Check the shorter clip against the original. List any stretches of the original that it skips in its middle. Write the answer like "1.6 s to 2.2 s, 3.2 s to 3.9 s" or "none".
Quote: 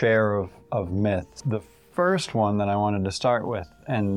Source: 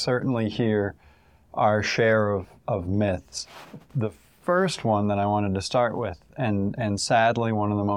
3.3 s to 3.8 s